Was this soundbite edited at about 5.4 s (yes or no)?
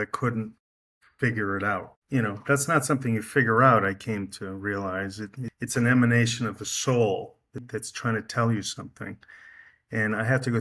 yes